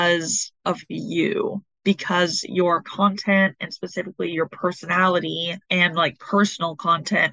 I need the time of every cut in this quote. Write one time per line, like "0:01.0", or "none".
0:05.5

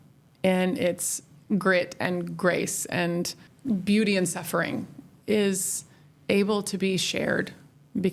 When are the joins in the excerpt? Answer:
0:03.5

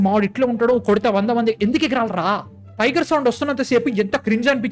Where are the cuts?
0:02.6

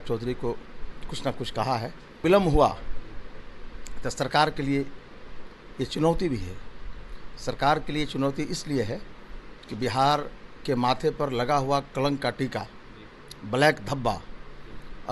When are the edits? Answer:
0:02.2

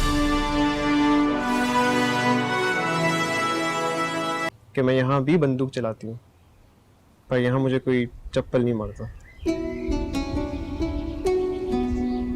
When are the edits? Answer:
0:04.5

